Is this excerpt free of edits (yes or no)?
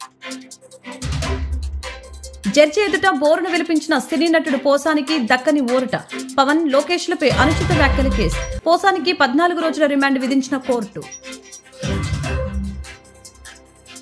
yes